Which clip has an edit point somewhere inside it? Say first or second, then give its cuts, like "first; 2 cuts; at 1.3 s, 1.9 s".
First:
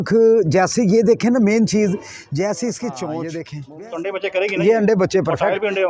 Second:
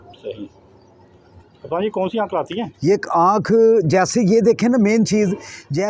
first; 1 cut; at 3.6 s